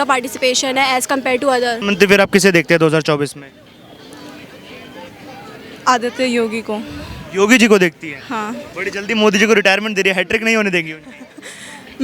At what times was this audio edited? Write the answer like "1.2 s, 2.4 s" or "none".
1.8 s